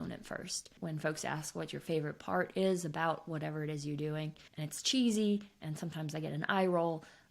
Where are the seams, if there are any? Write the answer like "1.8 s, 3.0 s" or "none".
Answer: 4.5 s